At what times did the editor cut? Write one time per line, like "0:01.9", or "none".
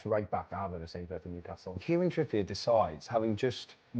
0:01.8